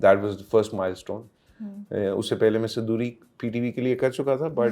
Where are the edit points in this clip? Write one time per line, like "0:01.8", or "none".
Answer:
none